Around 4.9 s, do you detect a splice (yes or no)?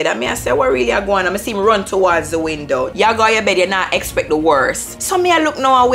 yes